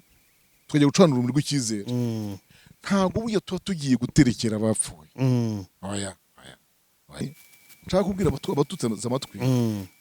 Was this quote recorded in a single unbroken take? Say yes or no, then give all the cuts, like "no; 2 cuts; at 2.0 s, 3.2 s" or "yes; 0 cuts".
no; 1 cut; at 7.3 s